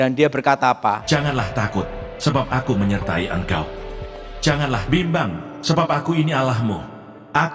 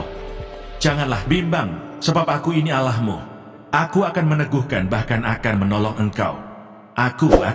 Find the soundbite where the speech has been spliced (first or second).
first